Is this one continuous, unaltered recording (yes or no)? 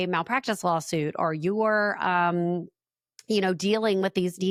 yes